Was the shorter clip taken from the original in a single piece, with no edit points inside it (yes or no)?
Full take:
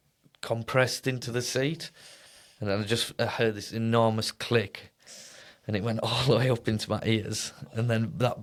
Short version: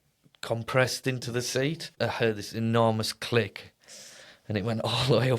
no